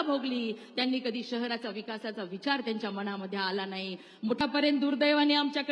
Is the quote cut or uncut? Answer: cut